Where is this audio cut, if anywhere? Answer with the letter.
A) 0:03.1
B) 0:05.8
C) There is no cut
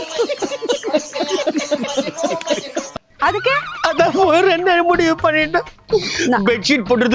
B